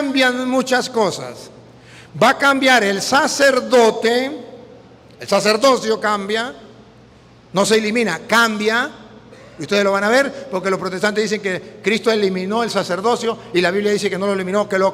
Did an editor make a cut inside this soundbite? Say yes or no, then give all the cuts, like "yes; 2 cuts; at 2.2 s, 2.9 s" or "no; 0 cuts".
no; 0 cuts